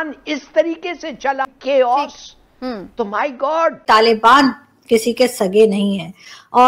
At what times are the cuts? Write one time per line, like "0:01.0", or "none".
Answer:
0:01.5
0:03.8